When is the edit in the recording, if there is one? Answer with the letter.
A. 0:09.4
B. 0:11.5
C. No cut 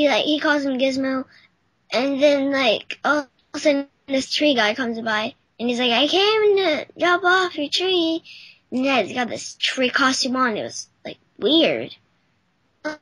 A